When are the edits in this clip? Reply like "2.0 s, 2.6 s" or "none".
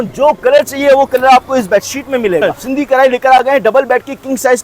2.4 s